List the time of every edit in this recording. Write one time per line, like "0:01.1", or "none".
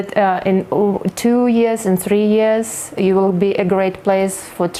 none

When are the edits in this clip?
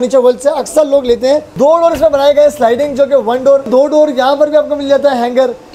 0:01.5
0:03.7

